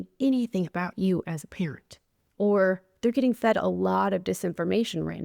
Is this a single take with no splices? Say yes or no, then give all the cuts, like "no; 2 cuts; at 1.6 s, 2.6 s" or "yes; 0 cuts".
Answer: yes; 0 cuts